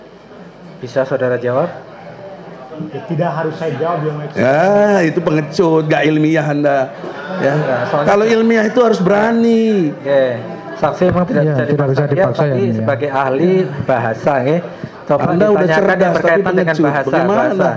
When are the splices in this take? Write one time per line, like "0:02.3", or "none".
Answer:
none